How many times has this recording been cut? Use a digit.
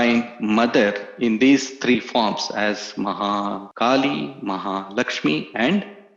1